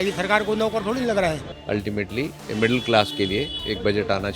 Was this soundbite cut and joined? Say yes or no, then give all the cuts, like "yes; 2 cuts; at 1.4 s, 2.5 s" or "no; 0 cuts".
yes; 1 cut; at 1.5 s